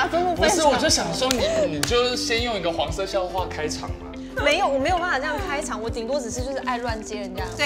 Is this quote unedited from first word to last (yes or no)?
yes